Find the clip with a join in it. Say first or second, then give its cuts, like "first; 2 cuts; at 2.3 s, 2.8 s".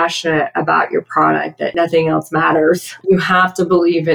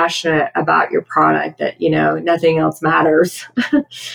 first; 2 cuts; at 1.7 s, 2.9 s